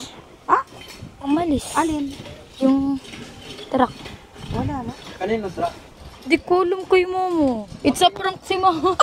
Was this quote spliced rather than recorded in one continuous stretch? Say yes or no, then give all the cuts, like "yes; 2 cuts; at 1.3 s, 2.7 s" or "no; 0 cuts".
no; 0 cuts